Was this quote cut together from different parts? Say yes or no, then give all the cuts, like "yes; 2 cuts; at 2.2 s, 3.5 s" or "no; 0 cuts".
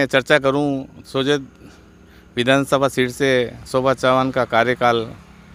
no; 0 cuts